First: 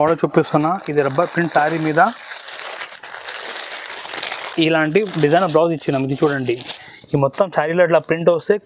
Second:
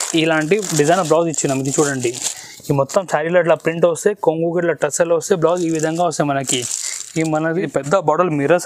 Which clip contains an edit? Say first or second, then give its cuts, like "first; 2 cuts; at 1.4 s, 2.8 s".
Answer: second; 1 cut; at 7.5 s